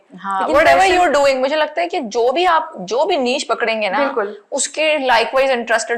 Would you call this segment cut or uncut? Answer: uncut